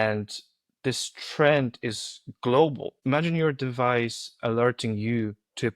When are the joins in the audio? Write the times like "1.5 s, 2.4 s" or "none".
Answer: 2.9 s